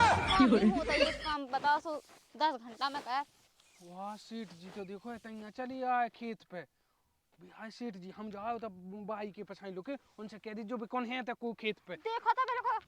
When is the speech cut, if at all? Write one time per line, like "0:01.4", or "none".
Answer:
0:01.1